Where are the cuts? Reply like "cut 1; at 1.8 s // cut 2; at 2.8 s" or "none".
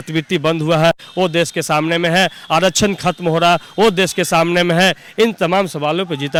none